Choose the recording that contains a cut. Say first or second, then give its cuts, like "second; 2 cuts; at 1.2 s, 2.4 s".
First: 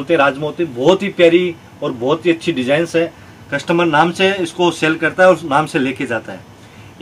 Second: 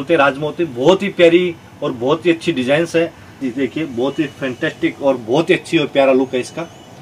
second; 1 cut; at 3.4 s